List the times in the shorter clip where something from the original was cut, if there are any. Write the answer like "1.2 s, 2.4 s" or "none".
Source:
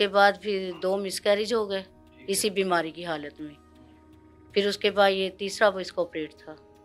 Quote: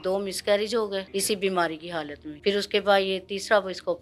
1.1 s, 2.2 s